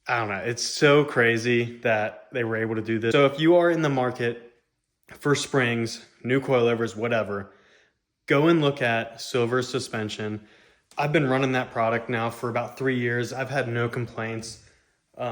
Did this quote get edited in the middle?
yes; 2 cuts; at 3.1 s, 10.9 s

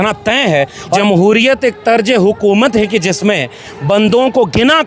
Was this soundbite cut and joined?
yes; 1 cut; at 1.0 s

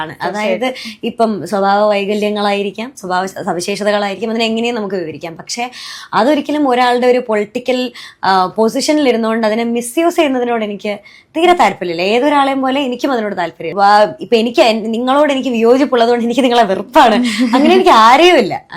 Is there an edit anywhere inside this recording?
yes; 1 cut; at 13.7 s

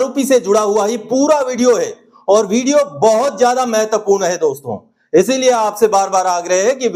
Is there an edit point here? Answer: no; 0 cuts

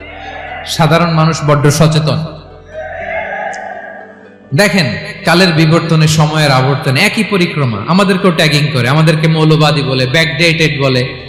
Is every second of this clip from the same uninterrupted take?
yes; 0 cuts

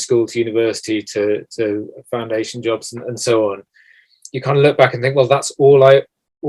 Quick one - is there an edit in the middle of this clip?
no; 0 cuts

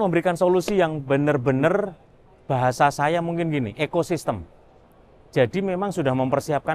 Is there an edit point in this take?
no; 0 cuts

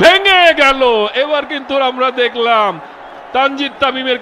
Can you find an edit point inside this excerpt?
no; 0 cuts

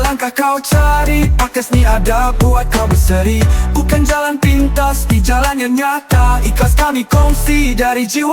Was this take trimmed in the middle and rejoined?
no; 0 cuts

